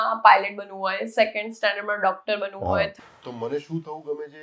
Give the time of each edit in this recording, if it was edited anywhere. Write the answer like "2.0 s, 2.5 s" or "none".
2.9 s

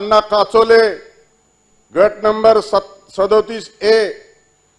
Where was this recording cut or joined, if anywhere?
none

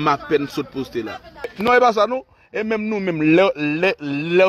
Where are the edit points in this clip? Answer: 1.5 s

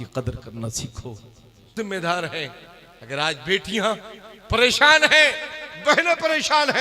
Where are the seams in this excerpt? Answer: 1.7 s

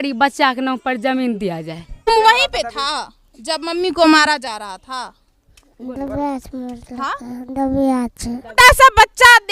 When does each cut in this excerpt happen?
2.1 s, 8.5 s

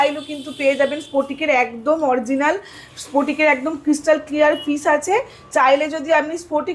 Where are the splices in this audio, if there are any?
none

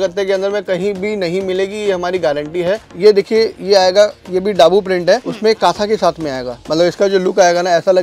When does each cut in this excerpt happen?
2.8 s, 6.6 s

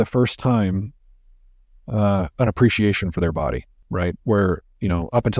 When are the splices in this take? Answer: 3.7 s

